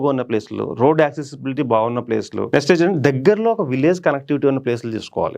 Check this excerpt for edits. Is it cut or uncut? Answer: cut